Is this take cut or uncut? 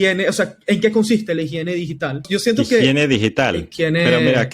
cut